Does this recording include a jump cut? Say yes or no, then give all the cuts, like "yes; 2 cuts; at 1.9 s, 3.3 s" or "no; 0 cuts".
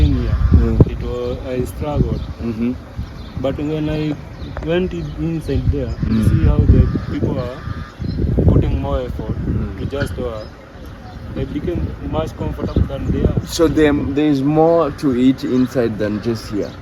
no; 0 cuts